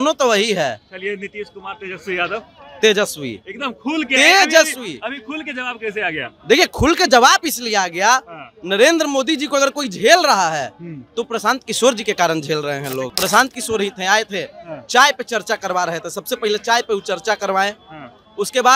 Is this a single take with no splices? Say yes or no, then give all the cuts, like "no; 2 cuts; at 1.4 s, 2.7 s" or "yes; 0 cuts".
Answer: no; 1 cut; at 13.1 s